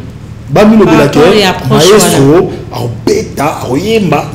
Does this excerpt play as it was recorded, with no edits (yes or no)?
yes